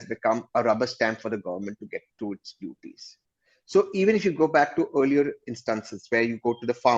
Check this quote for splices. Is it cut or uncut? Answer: uncut